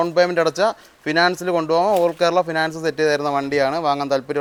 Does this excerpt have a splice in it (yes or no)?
no